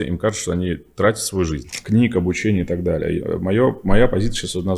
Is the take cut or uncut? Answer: cut